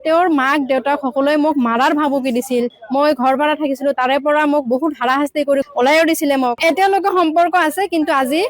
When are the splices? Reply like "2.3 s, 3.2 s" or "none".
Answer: 2.8 s, 5.7 s, 6.6 s